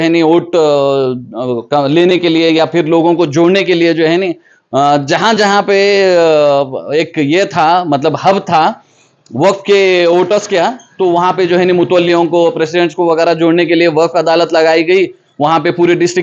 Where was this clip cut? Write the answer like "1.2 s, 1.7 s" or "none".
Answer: none